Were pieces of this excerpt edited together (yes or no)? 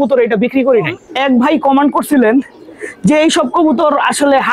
yes